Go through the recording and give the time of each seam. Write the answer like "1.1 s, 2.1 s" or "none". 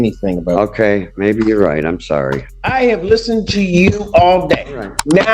2.5 s